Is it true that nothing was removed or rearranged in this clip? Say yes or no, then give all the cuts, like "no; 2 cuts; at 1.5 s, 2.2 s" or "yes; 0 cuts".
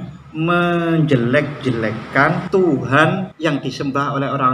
no; 2 cuts; at 2.4 s, 3.3 s